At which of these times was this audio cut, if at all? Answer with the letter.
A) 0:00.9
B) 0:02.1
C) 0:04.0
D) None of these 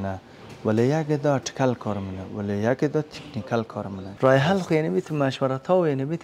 C